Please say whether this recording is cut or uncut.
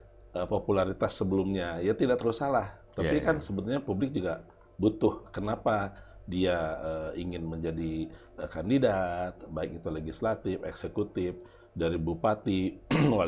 uncut